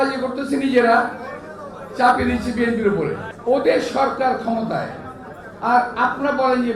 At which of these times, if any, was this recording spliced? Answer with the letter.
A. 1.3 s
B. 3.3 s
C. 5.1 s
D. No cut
B